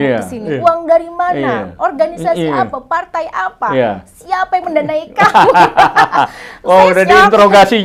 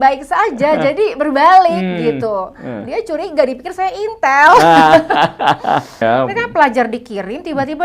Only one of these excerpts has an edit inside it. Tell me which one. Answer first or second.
second